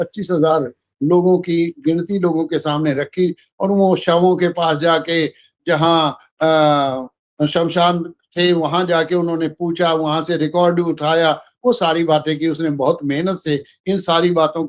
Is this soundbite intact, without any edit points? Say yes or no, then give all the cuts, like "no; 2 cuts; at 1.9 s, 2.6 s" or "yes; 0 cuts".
yes; 0 cuts